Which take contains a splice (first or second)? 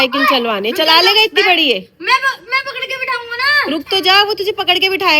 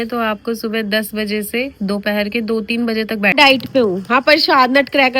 second